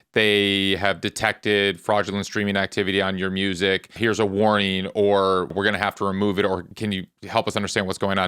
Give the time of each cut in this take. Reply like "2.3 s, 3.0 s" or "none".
4.0 s, 5.5 s, 6.7 s